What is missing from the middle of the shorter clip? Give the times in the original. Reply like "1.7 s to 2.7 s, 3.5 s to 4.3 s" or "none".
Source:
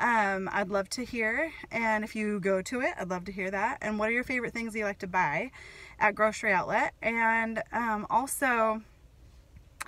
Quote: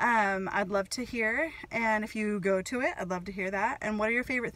none